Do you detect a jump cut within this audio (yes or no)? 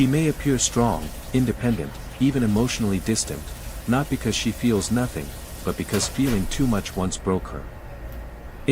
no